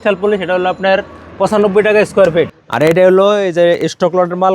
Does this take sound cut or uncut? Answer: cut